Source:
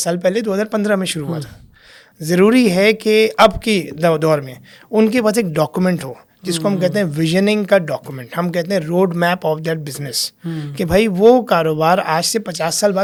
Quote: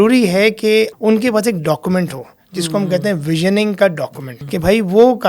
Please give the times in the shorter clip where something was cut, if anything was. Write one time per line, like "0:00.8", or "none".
0:00.9
0:04.3

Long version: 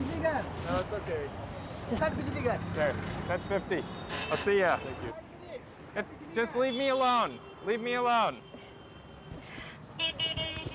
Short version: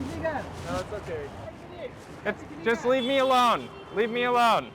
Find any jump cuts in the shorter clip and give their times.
0:01.6

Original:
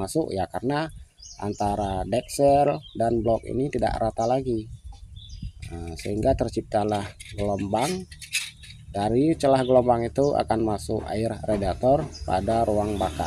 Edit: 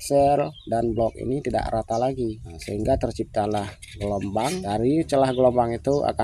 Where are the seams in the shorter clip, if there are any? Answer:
0:02.5
0:04.6

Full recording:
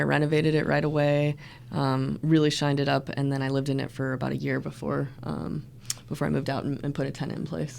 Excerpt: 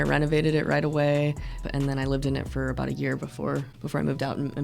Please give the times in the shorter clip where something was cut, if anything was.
0:01.7
0:03.7

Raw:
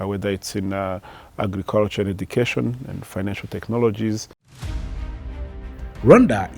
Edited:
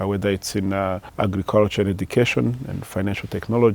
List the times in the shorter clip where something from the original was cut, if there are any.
0:01.0

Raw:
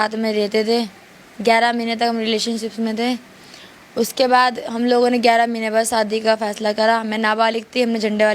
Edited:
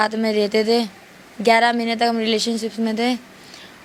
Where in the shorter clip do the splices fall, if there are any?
none

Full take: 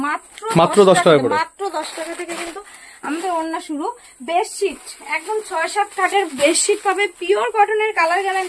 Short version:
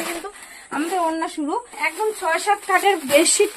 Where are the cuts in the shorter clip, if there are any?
0:01.8

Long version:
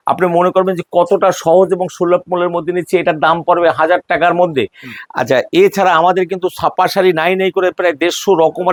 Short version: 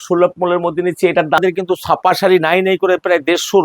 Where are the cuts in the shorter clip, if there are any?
0:01.4

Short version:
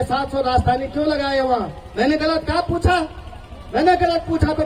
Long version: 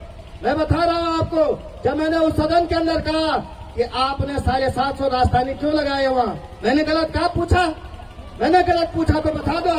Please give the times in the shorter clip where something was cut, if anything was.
none

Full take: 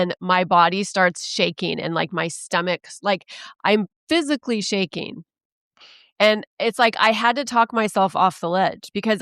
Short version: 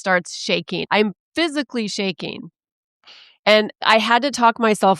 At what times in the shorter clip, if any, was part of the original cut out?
0:00.8
0:03.8

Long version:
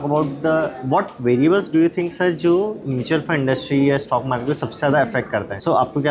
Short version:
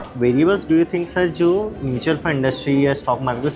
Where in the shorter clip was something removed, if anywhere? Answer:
none

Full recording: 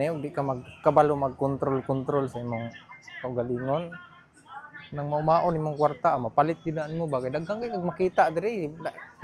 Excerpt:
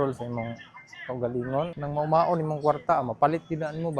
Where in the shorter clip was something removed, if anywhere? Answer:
0:01.7

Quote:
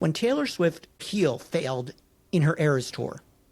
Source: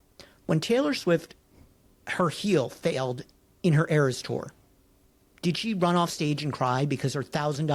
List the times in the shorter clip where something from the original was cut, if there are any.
0:01.1

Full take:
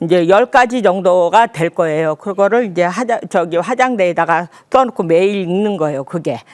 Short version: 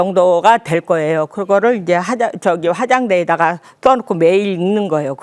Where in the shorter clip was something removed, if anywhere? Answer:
none

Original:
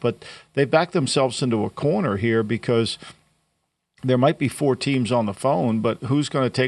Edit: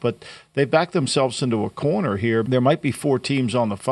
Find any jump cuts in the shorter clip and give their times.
0:02.5

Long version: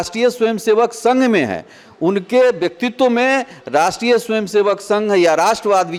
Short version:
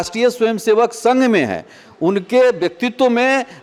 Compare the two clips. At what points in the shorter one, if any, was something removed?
none

